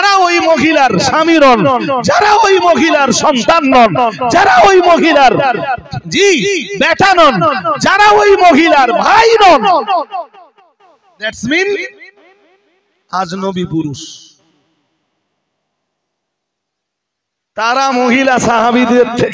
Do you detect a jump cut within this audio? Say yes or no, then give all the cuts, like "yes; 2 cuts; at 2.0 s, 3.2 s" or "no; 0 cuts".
no; 0 cuts